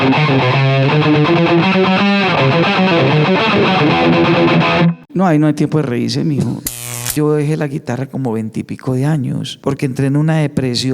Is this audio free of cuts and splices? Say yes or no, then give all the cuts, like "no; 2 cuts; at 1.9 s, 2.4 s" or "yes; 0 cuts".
no; 3 cuts; at 5.0 s, 6.9 s, 9.5 s